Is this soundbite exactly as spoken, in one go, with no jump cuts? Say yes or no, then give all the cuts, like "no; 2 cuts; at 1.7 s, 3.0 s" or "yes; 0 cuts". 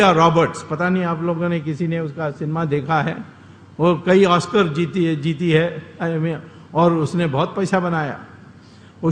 yes; 0 cuts